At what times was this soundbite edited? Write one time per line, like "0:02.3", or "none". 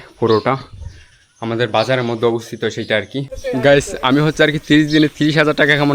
0:03.3